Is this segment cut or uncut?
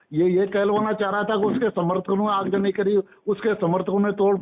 uncut